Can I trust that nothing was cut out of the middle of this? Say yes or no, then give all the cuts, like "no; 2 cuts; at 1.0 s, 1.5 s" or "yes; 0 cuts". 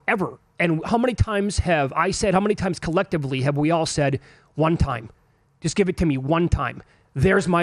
yes; 0 cuts